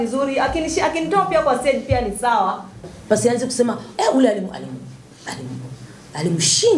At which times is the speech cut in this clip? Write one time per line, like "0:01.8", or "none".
0:02.8

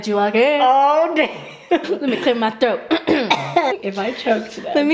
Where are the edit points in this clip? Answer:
0:01.8
0:03.7

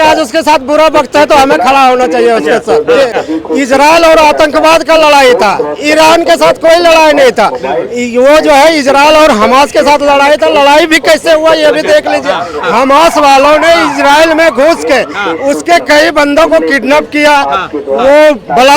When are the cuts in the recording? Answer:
0:03.2

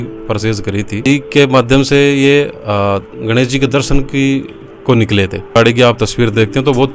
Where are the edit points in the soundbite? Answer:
0:01.1
0:05.6

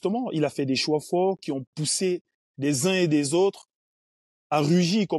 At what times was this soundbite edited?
none

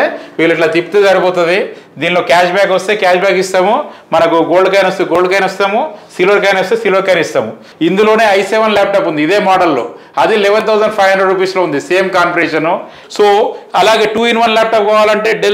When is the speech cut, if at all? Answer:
0:07.6
0:13.0

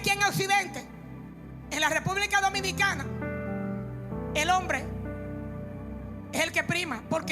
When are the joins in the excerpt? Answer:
0:03.9

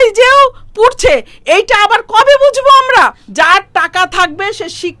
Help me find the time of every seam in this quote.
0:03.2

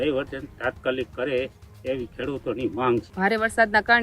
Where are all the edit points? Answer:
0:03.1

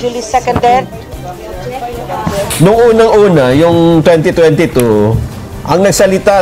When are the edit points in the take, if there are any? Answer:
0:02.5

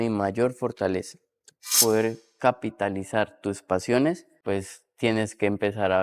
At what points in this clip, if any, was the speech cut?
0:01.8
0:04.3

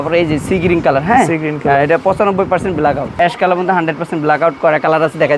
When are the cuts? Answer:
0:03.1

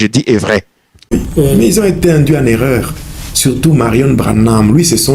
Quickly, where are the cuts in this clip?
0:01.1

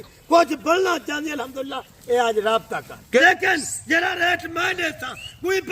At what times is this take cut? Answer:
0:03.2

